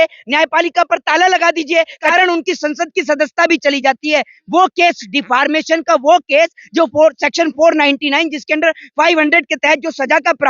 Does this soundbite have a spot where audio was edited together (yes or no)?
yes